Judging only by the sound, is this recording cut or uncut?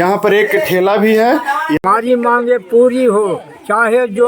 cut